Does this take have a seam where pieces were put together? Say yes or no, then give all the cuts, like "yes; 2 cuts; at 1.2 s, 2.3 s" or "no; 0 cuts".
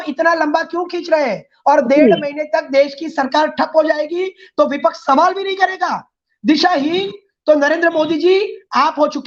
no; 0 cuts